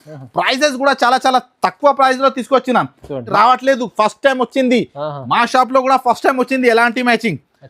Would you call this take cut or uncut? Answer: cut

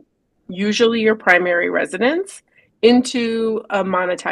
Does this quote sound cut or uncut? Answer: uncut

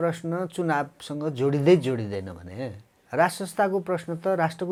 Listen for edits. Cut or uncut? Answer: uncut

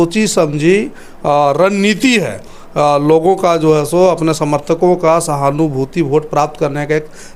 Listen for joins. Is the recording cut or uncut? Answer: uncut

